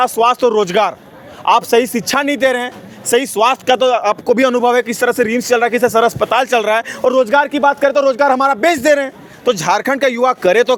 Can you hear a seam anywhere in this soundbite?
no; 0 cuts

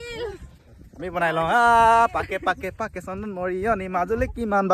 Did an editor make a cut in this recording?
no; 0 cuts

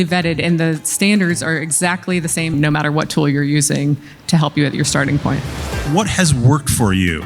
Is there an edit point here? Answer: yes; 2 cuts; at 2.5 s, 5.8 s

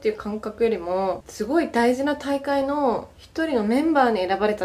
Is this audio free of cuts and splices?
yes; 0 cuts

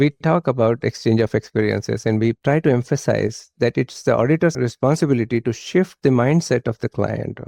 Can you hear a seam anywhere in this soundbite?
no; 0 cuts

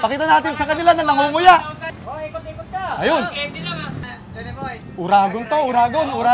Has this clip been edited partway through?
yes; 2 cuts; at 2.0 s, 4.1 s

